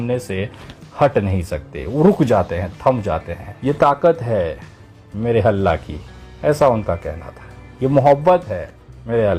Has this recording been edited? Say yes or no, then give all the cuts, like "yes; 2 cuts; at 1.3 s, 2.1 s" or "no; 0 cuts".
no; 0 cuts